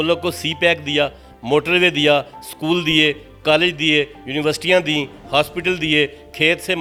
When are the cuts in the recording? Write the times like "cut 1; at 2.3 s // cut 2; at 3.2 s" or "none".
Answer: none